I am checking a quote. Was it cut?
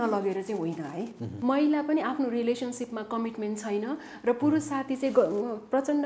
yes; 1 cut; at 1.2 s

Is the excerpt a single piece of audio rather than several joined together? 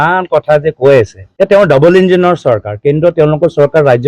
no; 1 cut; at 1.2 s

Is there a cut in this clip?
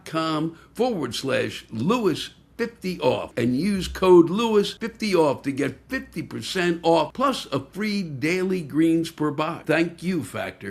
yes; 4 cuts; at 3.3 s, 4.8 s, 7.1 s, 9.6 s

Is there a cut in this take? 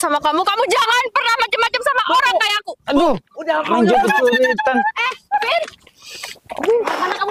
no; 0 cuts

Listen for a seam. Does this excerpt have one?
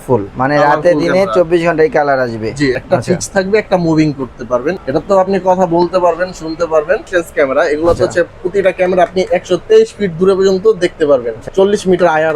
yes; 4 cuts; at 2.8 s, 4.8 s, 7.1 s, 11.4 s

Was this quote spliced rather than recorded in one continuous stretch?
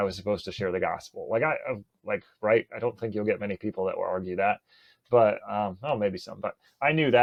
no; 0 cuts

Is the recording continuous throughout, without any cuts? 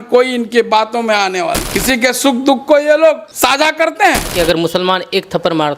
no; 3 cuts; at 1.7 s, 3.3 s, 4.3 s

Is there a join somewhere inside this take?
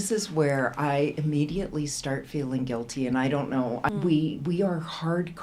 yes; 1 cut; at 3.9 s

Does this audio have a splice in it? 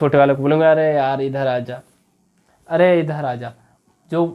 no; 0 cuts

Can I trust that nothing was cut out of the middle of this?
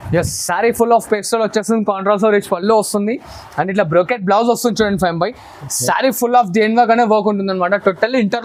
yes; 0 cuts

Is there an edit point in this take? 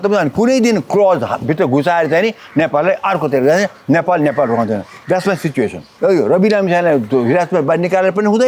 yes; 1 cut; at 5.9 s

